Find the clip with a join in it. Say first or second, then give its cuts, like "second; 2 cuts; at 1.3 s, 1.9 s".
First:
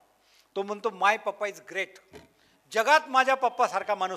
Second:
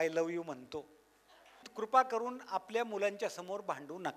second; 1 cut; at 1.7 s